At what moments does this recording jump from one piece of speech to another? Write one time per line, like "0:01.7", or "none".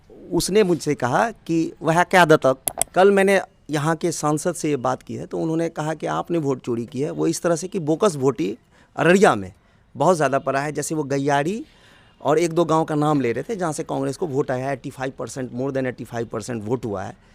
0:02.7